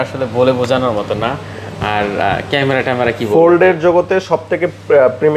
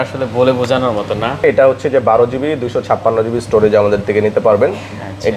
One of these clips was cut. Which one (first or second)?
second